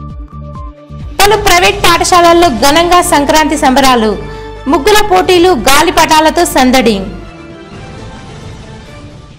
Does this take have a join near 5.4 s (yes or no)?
no